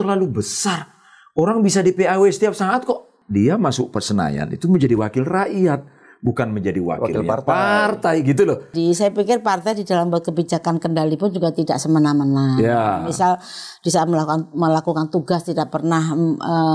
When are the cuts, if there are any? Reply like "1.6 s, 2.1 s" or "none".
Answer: 3.2 s, 8.7 s